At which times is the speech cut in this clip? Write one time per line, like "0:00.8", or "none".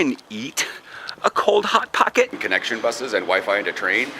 0:02.4